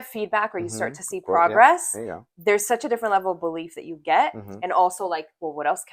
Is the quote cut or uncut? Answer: uncut